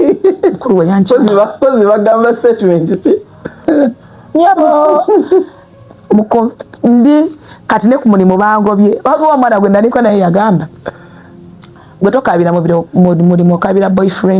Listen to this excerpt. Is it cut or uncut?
cut